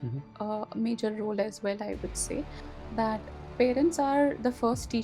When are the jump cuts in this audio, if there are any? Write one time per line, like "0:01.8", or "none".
none